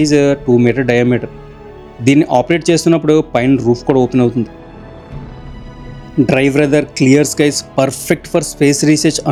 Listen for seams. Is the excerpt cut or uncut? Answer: uncut